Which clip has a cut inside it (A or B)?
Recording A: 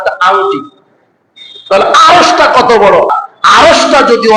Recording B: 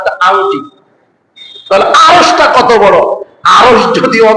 A